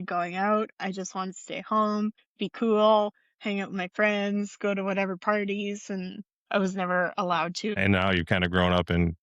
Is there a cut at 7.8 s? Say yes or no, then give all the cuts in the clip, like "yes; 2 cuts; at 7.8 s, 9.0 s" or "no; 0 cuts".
yes; 1 cut; at 7.8 s